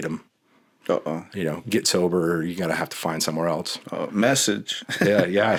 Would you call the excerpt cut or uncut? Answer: uncut